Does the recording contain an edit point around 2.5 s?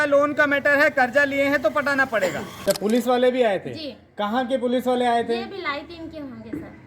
yes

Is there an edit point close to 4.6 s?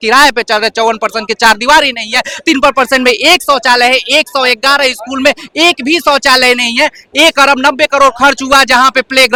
no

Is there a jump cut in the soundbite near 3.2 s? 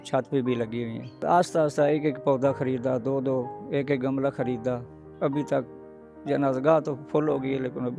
no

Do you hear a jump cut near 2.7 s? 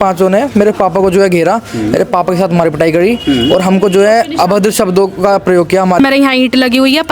no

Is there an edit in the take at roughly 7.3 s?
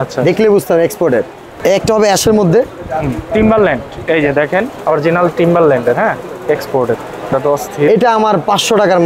yes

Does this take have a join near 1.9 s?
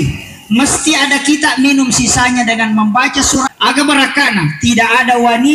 no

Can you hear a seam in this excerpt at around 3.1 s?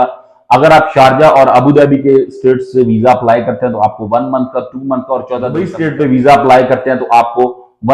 no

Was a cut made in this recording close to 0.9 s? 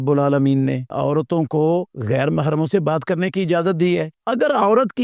yes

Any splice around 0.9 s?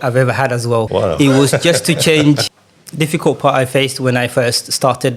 yes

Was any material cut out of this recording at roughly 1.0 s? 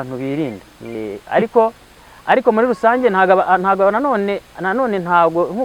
yes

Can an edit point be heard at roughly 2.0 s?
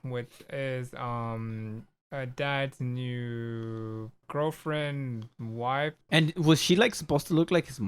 no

